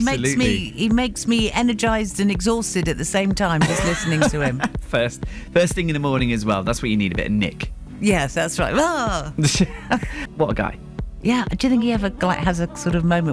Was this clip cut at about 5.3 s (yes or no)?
yes